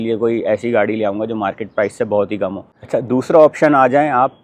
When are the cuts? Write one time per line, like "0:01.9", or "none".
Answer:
0:02.7